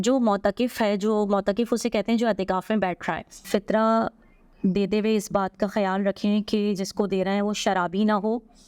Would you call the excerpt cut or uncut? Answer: cut